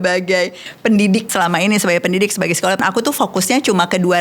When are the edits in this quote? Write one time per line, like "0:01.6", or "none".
0:01.3
0:02.8